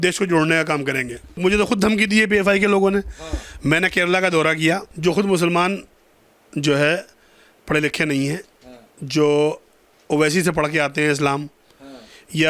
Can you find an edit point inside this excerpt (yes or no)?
yes